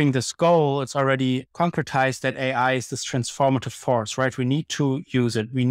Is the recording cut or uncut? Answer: cut